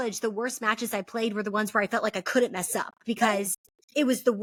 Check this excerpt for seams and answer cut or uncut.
uncut